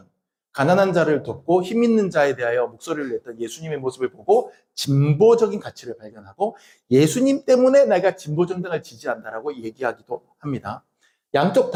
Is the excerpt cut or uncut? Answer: uncut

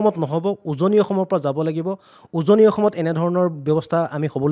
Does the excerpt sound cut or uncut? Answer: uncut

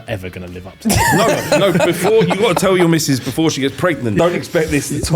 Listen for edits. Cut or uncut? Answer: cut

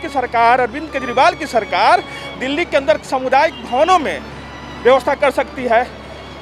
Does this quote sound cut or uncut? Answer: uncut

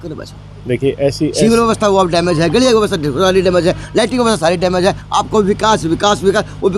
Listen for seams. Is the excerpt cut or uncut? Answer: uncut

